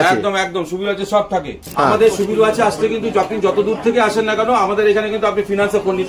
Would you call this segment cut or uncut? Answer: cut